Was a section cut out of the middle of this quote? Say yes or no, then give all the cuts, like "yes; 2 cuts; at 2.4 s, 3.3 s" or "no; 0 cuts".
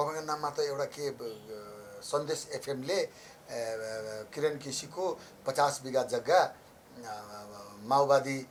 no; 0 cuts